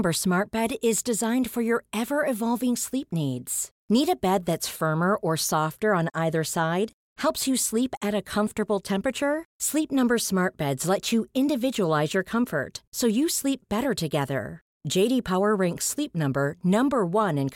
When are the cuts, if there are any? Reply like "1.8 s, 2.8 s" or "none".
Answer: none